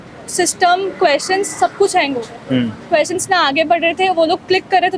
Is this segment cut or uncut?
uncut